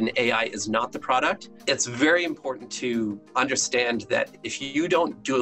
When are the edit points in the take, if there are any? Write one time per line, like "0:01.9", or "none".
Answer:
0:03.2